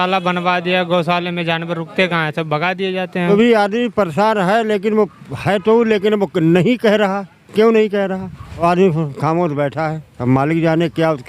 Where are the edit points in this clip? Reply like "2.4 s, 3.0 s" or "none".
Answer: 3.3 s, 8.6 s